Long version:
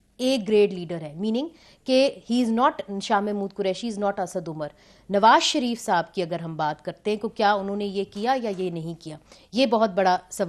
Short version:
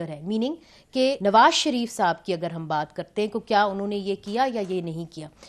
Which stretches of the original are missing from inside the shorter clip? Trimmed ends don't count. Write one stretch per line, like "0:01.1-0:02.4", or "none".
0:02.1-0:05.1